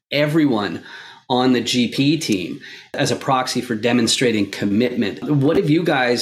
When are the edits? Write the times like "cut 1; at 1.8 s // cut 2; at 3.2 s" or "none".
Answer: cut 1; at 3.0 s // cut 2; at 5.2 s